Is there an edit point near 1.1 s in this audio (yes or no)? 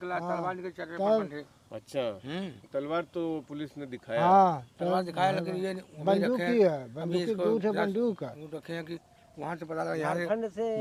no